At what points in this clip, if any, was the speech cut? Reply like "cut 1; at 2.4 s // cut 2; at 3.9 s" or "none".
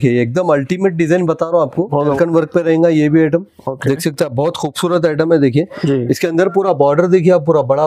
cut 1; at 2.2 s